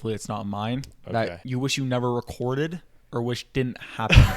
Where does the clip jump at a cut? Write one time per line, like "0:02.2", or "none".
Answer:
0:01.4